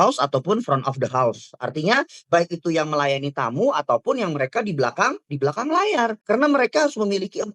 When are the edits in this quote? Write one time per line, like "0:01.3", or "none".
0:06.2

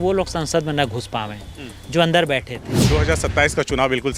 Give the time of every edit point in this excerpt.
0:02.9

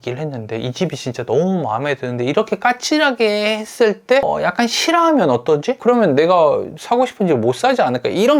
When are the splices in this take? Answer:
0:04.2
0:05.8

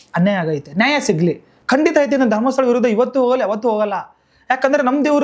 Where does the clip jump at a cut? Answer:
0:01.5

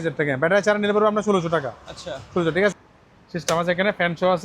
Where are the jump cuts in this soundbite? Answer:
0:02.7

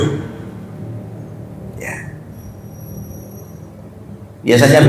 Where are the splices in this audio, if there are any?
none

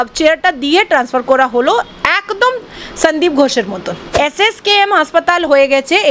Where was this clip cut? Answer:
0:04.2

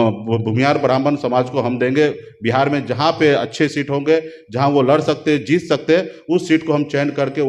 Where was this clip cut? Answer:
none

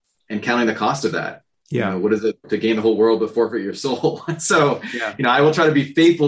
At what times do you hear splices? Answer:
0:02.4

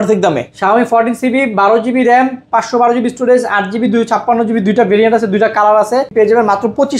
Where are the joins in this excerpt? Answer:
0:06.1

